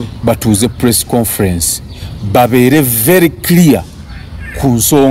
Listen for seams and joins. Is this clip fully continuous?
yes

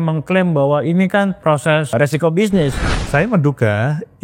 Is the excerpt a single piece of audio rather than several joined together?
no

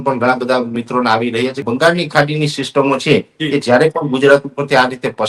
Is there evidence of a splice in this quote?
yes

